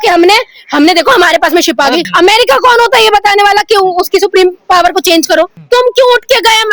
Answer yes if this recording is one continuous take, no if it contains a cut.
no